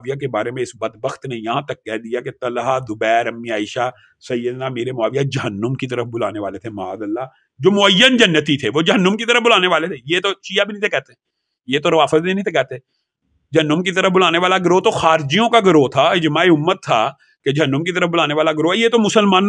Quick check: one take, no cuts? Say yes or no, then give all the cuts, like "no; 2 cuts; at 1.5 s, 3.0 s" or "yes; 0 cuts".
yes; 0 cuts